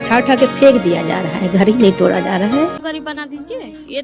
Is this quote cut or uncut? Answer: cut